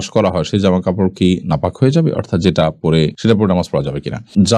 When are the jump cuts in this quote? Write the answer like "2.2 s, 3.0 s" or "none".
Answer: none